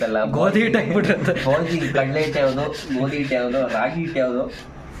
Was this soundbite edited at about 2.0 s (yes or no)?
no